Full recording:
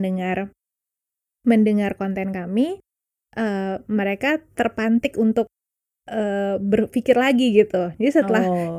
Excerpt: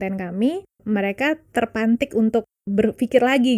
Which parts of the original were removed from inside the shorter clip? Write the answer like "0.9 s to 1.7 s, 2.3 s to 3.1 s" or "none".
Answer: 2.9 s to 3.8 s, 5.7 s to 6.6 s

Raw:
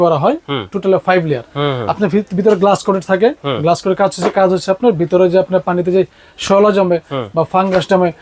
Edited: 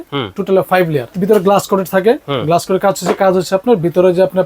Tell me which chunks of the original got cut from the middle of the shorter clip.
1.5 s to 2.3 s

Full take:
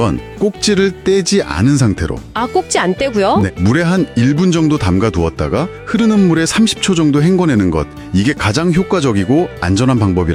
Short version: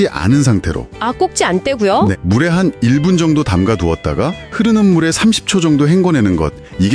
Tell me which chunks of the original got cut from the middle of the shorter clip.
none

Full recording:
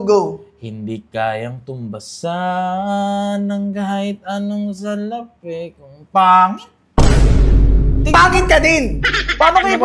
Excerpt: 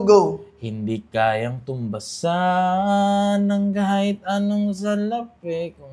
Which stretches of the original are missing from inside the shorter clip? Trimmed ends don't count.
none

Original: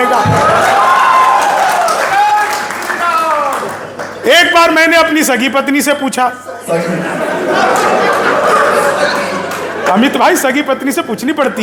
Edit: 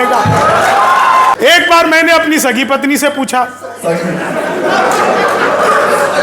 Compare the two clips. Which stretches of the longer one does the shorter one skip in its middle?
1.3 s to 4.2 s

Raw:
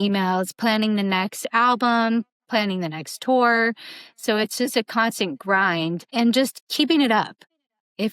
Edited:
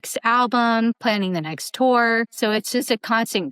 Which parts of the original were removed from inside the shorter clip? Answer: 2.3 s to 2.5 s, 3.8 s to 4.2 s

